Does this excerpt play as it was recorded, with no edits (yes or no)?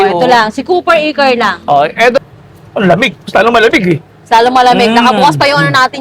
no